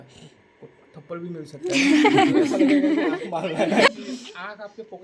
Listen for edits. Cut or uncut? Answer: cut